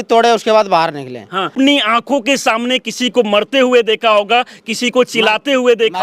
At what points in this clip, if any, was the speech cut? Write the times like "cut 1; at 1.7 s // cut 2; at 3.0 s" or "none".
cut 1; at 1.5 s